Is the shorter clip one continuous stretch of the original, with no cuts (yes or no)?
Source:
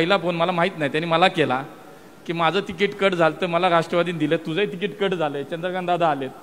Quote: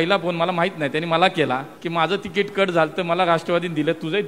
no